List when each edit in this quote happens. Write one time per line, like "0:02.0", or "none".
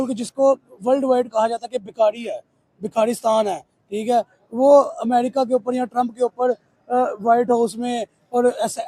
none